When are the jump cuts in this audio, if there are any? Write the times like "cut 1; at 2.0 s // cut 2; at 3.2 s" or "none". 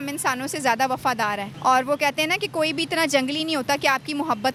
none